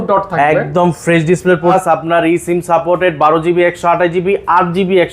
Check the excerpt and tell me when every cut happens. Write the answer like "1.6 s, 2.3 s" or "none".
1.7 s